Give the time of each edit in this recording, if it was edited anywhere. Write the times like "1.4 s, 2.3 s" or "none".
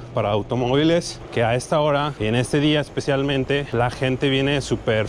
1.2 s, 2.1 s, 3.7 s